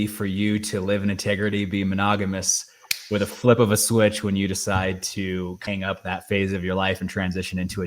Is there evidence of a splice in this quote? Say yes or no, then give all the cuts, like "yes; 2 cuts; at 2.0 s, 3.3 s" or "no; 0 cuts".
yes; 1 cut; at 5.6 s